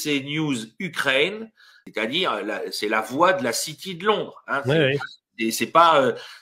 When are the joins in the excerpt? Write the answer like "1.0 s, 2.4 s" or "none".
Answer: 1.8 s